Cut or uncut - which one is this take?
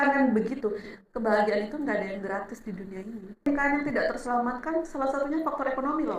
cut